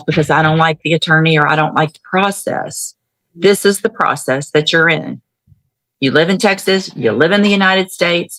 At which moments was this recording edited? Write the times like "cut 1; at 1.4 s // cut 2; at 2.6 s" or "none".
none